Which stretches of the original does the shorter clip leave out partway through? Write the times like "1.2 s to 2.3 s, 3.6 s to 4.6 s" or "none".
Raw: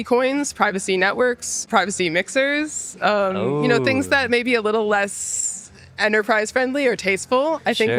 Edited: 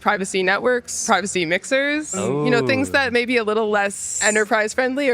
1.5 s to 1.6 s, 2.8 s to 3.3 s, 5.2 s to 5.8 s